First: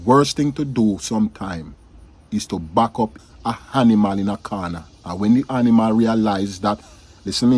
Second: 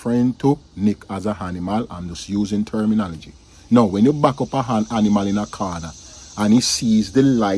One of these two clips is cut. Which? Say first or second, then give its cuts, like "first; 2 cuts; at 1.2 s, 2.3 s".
first; 1 cut; at 3.2 s